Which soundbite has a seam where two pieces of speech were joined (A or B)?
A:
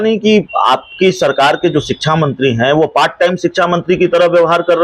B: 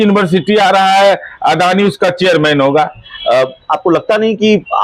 B